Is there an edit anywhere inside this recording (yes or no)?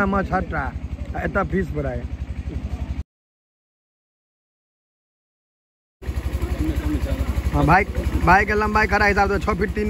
no